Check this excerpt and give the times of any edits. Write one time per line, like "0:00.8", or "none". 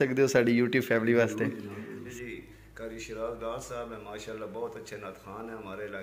0:02.0